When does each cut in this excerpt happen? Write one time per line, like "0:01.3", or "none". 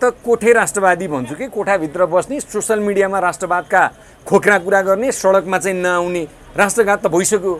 none